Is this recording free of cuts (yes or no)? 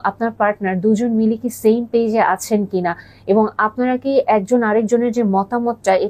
yes